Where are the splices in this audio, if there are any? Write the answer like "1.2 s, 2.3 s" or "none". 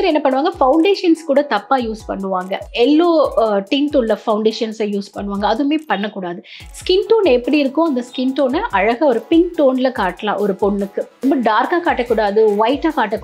11.2 s